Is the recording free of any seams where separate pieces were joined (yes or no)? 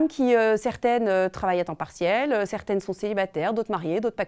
yes